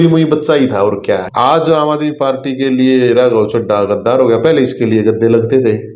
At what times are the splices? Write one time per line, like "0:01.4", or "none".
0:01.3

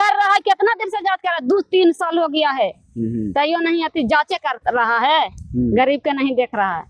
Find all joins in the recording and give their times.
none

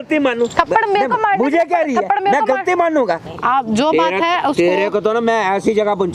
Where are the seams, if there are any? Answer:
0:03.2

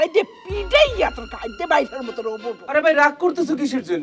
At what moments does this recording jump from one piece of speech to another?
0:02.5

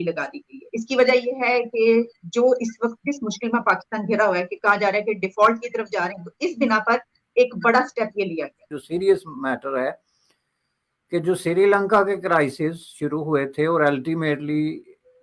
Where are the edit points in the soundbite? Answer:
none

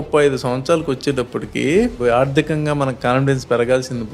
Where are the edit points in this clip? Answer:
0:02.0

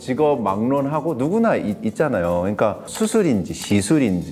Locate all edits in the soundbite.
0:02.9

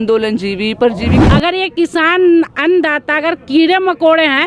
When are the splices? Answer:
0:01.2

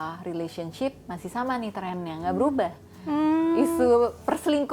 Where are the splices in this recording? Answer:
none

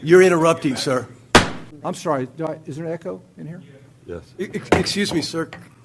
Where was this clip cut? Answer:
0:01.7

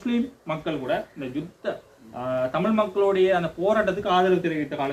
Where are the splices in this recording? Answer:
none

